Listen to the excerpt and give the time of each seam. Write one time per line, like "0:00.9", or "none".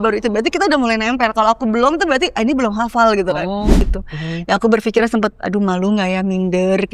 0:03.9